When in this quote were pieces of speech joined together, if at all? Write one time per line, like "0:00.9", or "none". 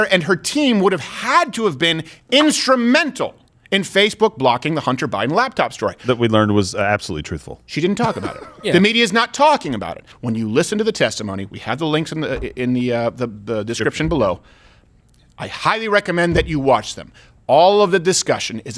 0:10.2